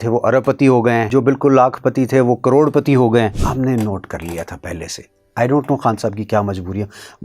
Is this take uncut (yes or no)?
no